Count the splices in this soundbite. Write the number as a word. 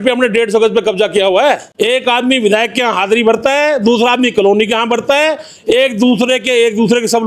one